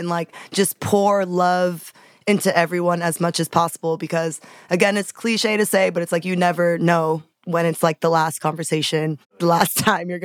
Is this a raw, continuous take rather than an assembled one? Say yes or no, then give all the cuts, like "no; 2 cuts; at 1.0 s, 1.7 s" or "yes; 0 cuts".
no; 2 cuts; at 7.3 s, 9.3 s